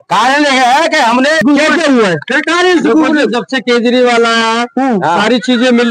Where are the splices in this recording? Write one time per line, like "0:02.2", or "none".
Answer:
0:01.4